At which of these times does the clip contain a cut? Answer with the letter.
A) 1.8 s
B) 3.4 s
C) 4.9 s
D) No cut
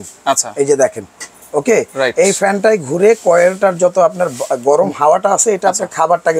D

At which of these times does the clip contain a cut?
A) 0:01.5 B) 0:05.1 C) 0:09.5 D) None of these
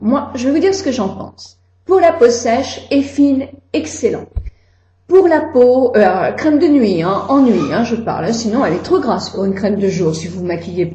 C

